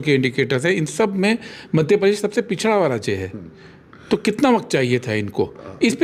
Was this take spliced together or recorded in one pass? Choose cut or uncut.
uncut